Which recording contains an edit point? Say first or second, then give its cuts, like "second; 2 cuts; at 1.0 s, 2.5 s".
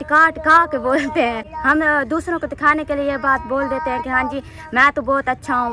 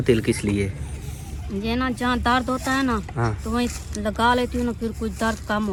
first; 1 cut; at 1.5 s